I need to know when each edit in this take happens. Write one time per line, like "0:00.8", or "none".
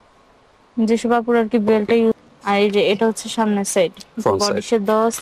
0:02.3

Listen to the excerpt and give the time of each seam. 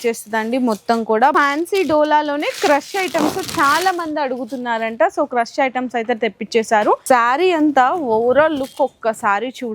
0:01.3
0:07.0

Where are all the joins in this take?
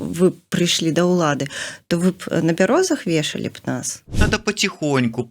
0:04.0

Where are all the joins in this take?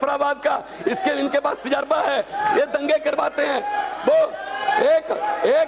none

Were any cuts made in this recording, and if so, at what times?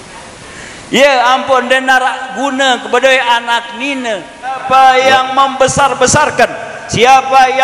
0:04.6

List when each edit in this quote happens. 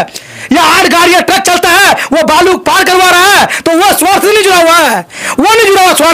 none

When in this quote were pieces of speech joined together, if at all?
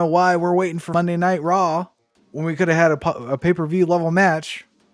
0:00.9

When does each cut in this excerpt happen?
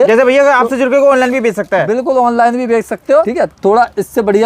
0:03.2

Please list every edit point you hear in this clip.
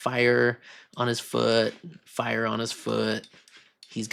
none

